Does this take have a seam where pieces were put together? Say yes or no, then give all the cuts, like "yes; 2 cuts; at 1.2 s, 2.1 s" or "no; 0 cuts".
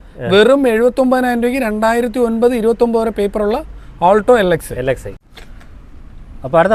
no; 0 cuts